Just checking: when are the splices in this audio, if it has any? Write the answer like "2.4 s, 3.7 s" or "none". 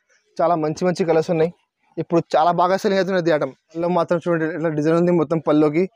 3.8 s